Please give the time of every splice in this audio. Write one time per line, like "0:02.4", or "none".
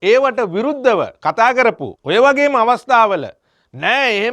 0:01.9